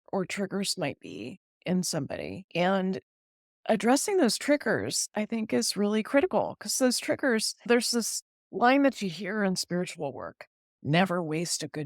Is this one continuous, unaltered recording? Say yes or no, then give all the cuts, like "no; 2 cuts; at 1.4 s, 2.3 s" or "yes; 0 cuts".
no; 1 cut; at 2.4 s